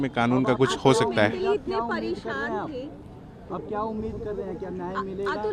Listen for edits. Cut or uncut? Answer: uncut